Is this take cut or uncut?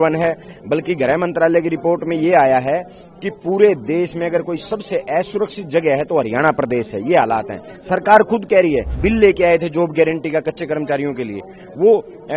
cut